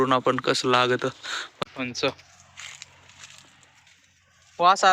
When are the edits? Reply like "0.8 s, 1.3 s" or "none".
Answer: 1.6 s

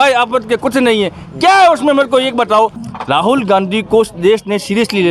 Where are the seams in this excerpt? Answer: 2.9 s

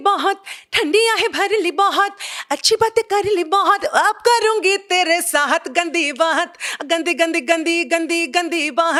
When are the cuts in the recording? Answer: none

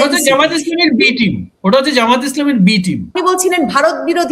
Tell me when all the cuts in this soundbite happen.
3.1 s

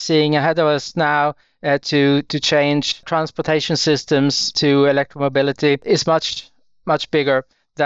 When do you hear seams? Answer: 3.0 s, 4.5 s, 5.8 s

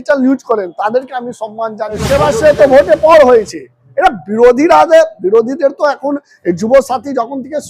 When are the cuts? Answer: 2.0 s

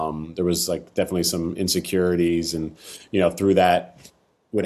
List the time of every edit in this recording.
none

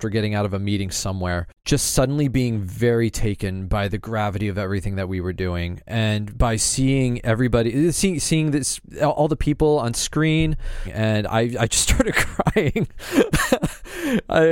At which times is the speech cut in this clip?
1.5 s, 10.9 s

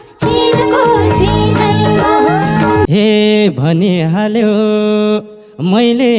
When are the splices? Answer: 2.9 s

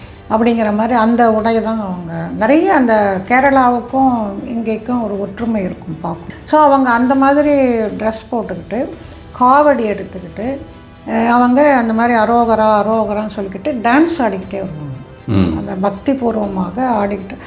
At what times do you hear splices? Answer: 6.3 s

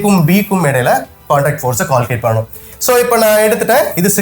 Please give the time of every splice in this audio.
2.6 s

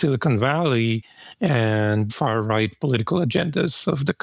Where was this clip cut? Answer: none

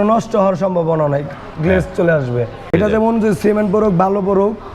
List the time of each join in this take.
2.7 s

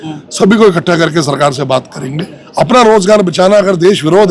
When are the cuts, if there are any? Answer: 2.4 s

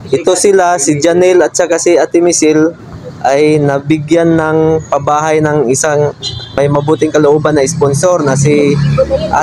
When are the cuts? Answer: 6.5 s

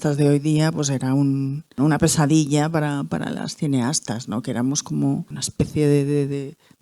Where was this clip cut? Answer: 1.8 s, 5.4 s

